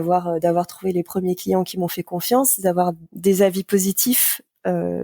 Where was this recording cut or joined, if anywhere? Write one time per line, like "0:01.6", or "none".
0:03.0